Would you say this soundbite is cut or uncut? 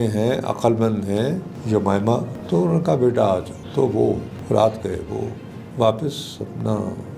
cut